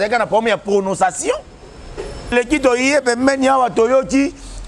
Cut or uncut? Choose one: cut